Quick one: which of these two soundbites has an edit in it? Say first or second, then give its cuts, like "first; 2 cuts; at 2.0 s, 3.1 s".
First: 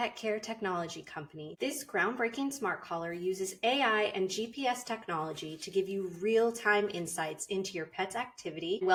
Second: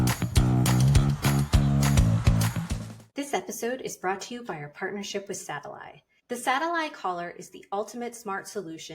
second; 2 cuts; at 1.2 s, 2.7 s